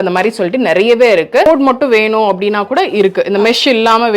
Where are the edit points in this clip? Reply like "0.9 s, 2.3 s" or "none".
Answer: 1.5 s